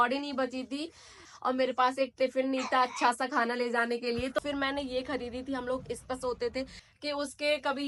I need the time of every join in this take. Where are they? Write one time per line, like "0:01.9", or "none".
0:01.3
0:04.4
0:06.8